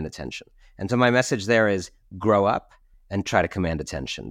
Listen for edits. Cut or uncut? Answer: uncut